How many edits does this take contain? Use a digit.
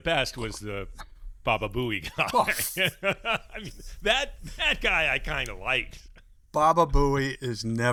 0